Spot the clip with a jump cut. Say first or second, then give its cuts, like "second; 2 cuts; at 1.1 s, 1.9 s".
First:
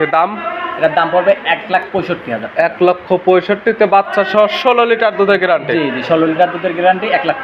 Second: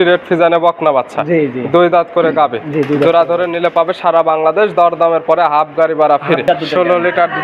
second; 1 cut; at 6.4 s